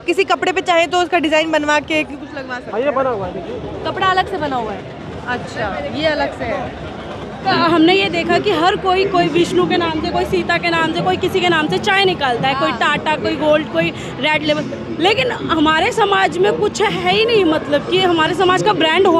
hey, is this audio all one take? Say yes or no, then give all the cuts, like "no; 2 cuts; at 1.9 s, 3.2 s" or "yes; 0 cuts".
no; 1 cut; at 7.5 s